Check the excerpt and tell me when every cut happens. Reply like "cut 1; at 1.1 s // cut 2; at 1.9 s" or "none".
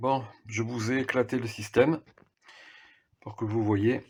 none